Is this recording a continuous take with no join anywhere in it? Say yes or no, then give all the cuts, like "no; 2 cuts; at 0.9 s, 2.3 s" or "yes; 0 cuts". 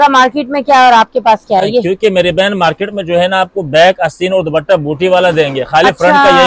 yes; 0 cuts